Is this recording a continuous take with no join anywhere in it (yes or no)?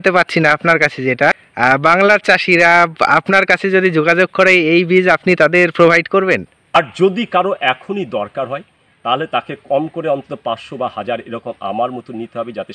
no